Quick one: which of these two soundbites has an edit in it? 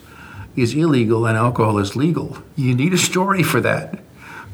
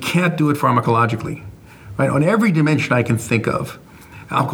first; 1 cut; at 2.4 s

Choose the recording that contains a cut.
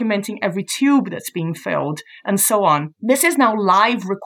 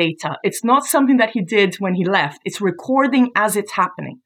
first; 1 cut; at 2.9 s

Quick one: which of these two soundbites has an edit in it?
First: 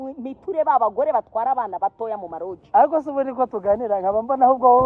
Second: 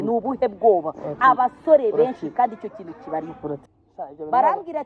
second; 1 cut; at 3.6 s

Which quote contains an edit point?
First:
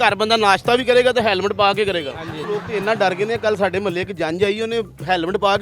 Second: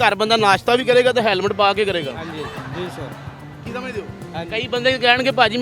first; 1 cut; at 2.3 s

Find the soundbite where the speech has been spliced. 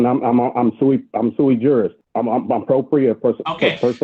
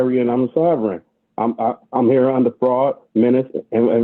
first; 1 cut; at 2.0 s

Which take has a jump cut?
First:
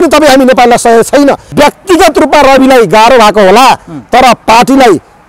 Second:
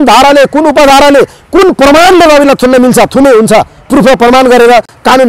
first; 1 cut; at 1.4 s

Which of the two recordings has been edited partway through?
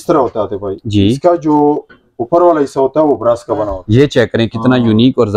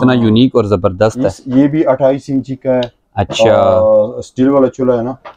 first; 1 cut; at 3.7 s

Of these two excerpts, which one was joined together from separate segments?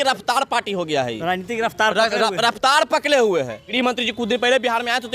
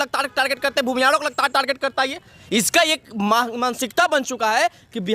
first; 1 cut; at 3.6 s

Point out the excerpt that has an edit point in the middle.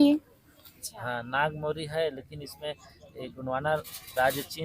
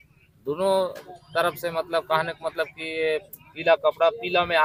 first; 1 cut; at 0.9 s

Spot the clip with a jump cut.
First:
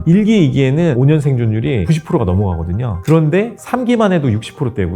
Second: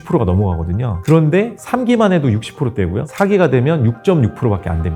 first; 1 cut; at 1.0 s

